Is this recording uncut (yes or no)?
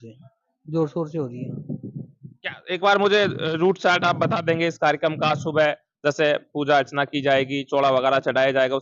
yes